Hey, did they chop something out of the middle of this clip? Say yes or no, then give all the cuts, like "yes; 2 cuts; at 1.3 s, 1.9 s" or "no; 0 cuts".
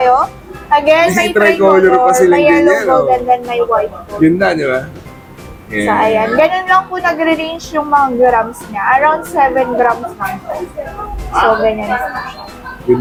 no; 0 cuts